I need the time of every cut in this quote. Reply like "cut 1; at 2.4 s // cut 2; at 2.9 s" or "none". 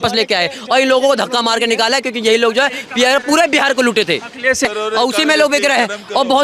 cut 1; at 4.6 s